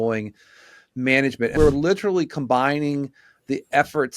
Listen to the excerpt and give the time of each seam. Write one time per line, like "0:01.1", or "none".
0:01.5